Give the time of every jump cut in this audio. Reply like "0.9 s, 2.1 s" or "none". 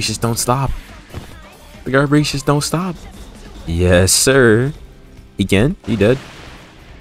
3.0 s, 5.8 s